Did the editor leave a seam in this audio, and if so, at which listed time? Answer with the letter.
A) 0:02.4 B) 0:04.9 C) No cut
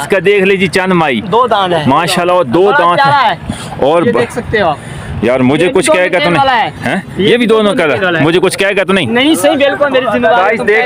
C